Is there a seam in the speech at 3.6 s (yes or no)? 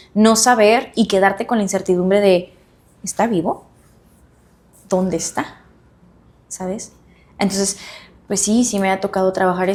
no